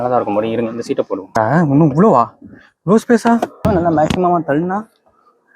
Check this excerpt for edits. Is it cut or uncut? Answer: cut